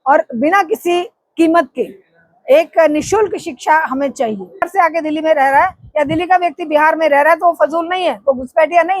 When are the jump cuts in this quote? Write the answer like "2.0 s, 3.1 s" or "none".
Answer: 4.7 s